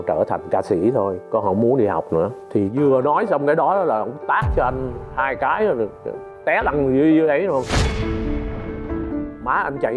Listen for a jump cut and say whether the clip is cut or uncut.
uncut